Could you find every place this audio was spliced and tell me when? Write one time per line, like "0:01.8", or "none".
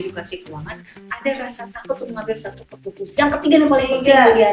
0:03.0